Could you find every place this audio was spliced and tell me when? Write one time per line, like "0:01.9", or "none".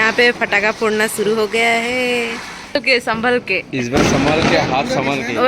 0:02.8